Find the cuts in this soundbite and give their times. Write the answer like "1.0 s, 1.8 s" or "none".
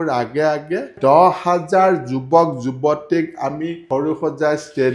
0.9 s, 3.8 s